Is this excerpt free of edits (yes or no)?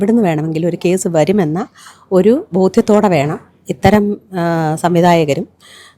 yes